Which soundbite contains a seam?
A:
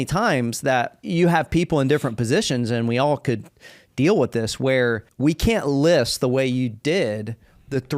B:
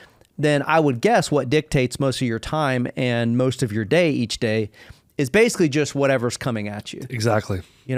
A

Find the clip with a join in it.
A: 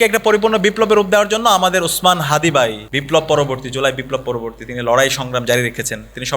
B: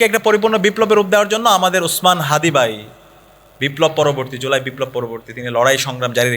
A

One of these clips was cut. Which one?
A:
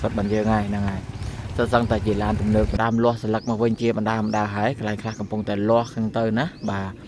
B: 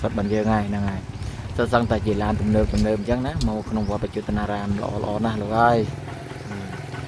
A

